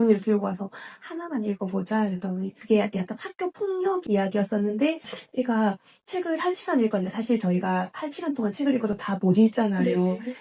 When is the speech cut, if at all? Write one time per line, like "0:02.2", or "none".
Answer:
0:02.5
0:05.1